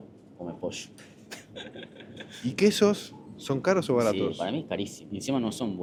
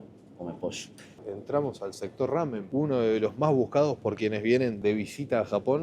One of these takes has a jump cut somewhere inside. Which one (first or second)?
second